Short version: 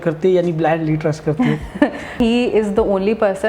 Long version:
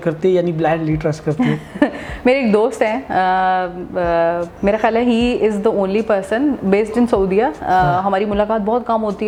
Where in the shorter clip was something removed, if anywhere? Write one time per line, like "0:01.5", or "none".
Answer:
0:02.2